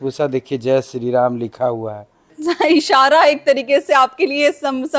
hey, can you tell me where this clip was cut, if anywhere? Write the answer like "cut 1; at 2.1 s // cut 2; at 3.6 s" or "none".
cut 1; at 2.3 s